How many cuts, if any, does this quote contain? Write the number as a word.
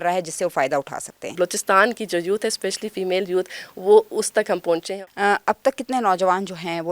two